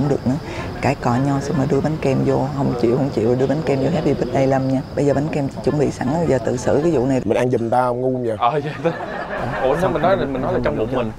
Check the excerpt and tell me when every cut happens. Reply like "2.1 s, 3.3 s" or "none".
7.2 s